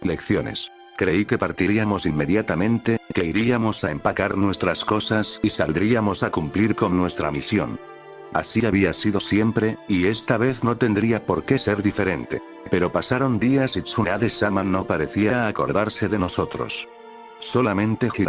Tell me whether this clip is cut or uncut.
cut